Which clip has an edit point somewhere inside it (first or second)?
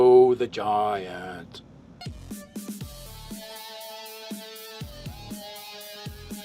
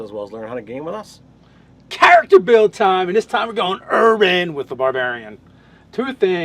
second